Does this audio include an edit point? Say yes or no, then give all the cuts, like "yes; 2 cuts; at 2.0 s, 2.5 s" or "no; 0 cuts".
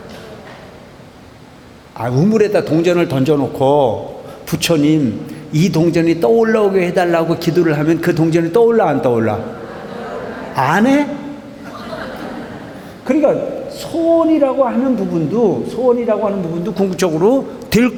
no; 0 cuts